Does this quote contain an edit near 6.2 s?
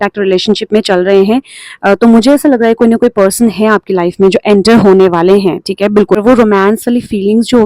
yes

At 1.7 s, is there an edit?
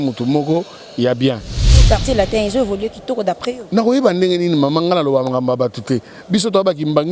yes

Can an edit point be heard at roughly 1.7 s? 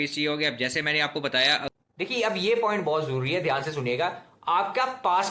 yes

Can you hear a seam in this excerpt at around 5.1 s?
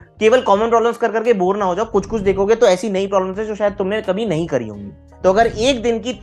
yes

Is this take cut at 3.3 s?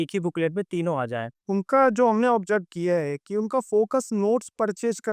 no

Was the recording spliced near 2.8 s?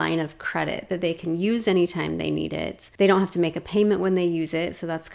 yes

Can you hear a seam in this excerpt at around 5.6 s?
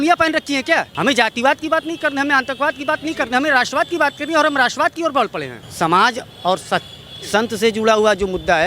yes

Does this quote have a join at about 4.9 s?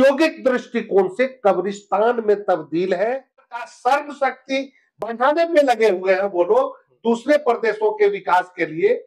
no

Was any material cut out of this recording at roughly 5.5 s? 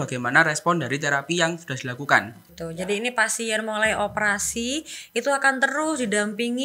no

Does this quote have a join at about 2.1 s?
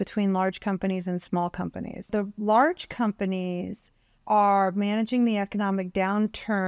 yes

